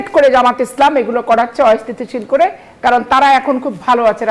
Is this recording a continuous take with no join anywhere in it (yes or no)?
yes